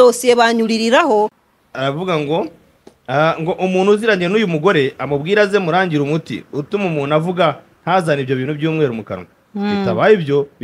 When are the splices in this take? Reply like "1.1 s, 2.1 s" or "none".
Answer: 1.4 s